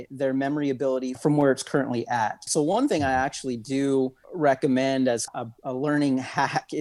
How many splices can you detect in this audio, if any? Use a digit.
4